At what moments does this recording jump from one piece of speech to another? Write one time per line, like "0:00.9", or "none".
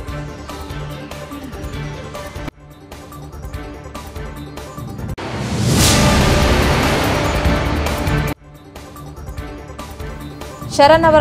0:10.0